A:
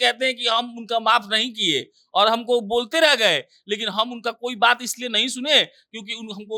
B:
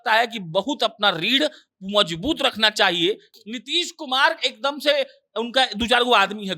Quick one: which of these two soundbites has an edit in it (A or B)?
B